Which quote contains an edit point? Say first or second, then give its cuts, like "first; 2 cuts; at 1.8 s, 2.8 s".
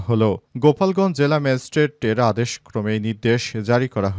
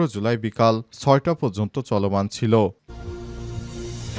second; 1 cut; at 2.8 s